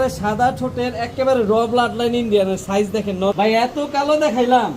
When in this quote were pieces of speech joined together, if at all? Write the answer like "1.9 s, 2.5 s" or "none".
3.3 s